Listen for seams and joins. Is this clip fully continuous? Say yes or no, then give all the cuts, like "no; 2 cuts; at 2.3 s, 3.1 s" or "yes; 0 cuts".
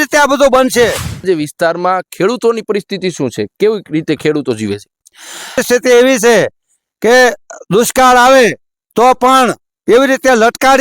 no; 2 cuts; at 1.2 s, 5.6 s